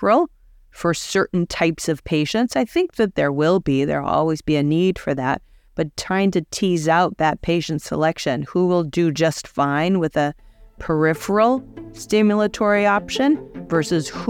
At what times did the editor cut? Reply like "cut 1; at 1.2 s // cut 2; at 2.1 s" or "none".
none